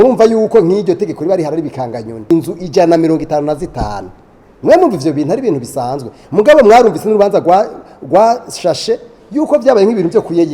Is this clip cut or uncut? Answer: cut